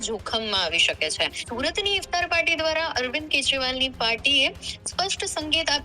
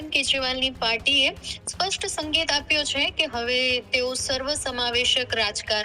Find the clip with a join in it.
first; 1 cut; at 1.4 s

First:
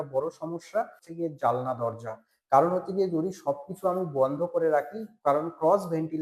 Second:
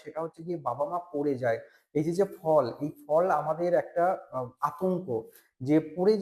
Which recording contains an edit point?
first; 1 cut; at 1.0 s

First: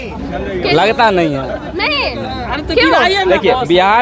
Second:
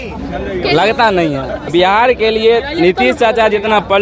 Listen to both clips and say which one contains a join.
second; 1 cut; at 1.7 s

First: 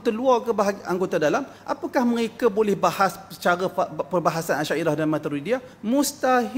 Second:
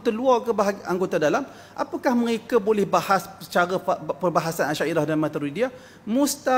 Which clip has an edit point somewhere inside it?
first; 2 cuts; at 1.6 s, 5.7 s

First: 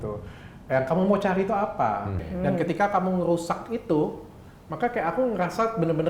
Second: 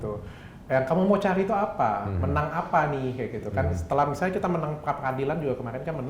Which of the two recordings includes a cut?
first; 1 cut; at 2.2 s

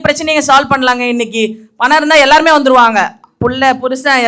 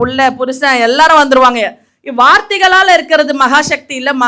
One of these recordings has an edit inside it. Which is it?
second; 1 cut; at 1.8 s

